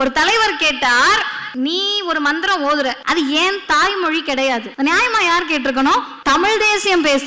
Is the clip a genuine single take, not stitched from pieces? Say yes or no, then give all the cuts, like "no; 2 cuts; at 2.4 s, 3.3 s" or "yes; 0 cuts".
no; 4 cuts; at 1.4 s, 3.0 s, 4.7 s, 6.1 s